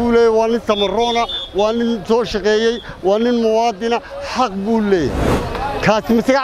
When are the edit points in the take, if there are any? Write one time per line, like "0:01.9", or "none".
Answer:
none